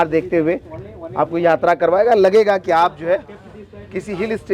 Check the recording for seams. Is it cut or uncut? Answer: uncut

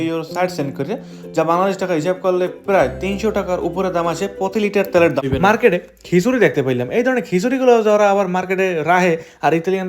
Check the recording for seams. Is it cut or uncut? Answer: cut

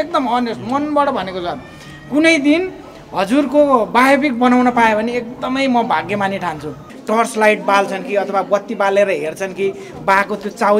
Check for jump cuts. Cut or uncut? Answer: cut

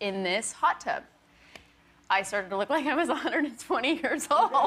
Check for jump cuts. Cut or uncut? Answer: cut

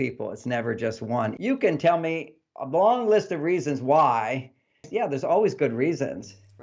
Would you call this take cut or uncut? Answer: cut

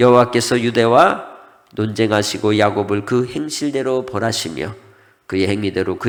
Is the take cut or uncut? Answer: uncut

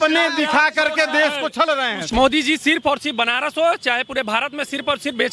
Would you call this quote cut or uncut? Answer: cut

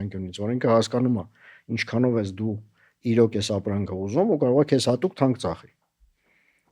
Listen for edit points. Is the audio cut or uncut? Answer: uncut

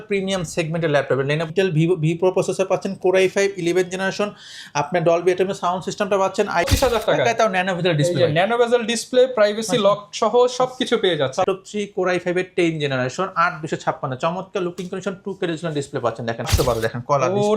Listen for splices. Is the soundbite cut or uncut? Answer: cut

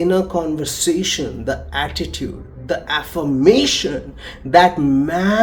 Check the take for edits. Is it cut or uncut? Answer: uncut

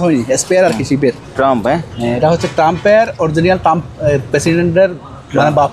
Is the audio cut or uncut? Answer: cut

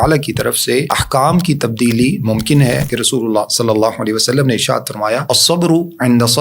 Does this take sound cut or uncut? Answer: cut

